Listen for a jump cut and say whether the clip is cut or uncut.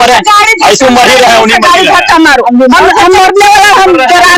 uncut